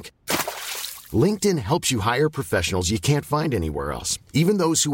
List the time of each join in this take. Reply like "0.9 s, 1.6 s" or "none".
none